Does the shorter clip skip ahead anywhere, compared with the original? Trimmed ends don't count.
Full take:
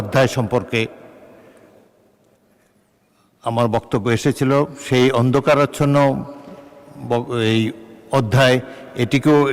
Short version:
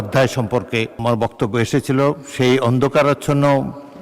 yes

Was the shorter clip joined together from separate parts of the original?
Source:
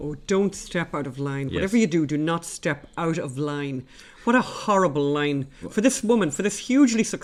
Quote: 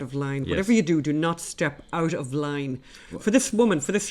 yes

